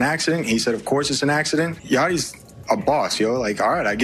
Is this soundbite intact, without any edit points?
no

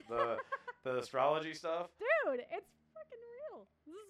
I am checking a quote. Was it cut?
no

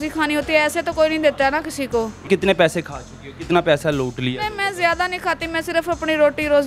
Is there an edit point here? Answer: yes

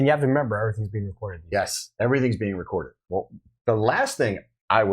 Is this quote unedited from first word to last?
no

